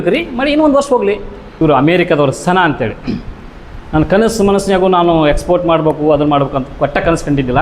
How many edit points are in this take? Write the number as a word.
one